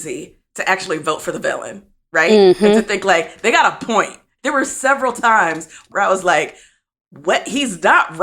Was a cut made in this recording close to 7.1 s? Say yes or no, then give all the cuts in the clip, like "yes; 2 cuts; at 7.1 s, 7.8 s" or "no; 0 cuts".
no; 2 cuts; at 4.3 s, 5.9 s